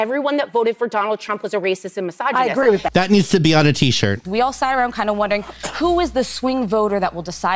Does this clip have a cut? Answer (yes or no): yes